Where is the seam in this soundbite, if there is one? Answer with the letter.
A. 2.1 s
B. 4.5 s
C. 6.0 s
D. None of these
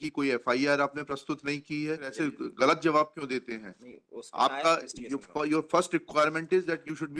A